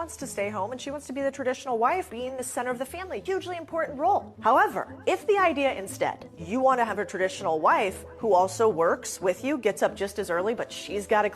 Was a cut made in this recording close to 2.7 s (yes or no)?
yes